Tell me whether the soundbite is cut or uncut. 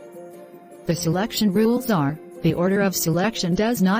uncut